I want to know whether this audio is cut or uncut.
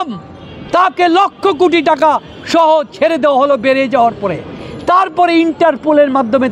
uncut